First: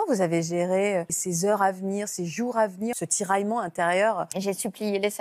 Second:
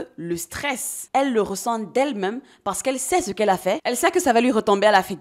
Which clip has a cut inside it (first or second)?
first